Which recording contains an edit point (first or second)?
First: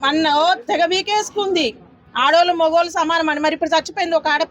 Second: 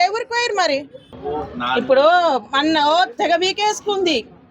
second